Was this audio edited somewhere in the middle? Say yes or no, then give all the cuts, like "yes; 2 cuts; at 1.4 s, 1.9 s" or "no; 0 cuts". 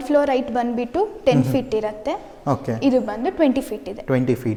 no; 0 cuts